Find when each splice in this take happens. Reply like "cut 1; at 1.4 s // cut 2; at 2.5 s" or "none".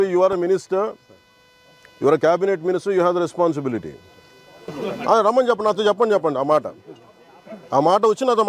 cut 1; at 4.7 s